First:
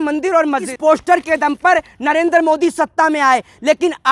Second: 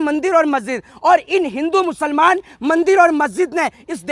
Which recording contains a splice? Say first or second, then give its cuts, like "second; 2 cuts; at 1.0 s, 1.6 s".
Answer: first; 1 cut; at 1.0 s